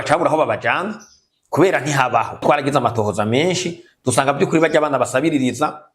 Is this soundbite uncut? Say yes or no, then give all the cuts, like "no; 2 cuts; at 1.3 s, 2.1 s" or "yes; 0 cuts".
no; 1 cut; at 2.4 s